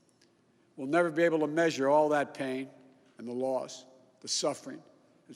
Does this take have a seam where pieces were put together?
no; 0 cuts

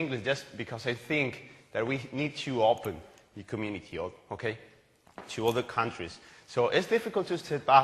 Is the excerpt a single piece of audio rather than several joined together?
no; 1 cut; at 4.4 s

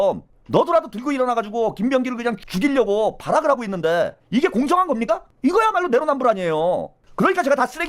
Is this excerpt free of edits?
yes; 0 cuts

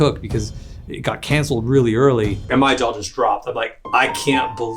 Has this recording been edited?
yes; 1 cut; at 2.4 s

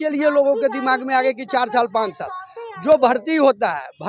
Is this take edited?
no; 0 cuts

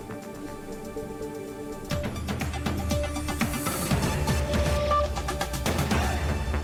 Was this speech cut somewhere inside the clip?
no; 0 cuts

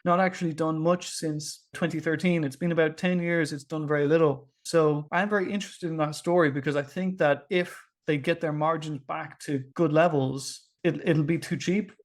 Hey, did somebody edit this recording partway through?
no; 0 cuts

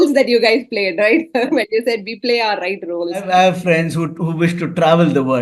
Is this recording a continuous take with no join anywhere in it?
yes; 0 cuts

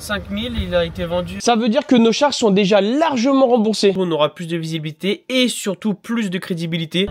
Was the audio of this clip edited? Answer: yes; 2 cuts; at 1.4 s, 3.9 s

